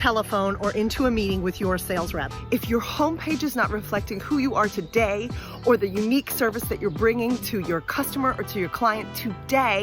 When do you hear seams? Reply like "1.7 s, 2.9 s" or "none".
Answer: 2.3 s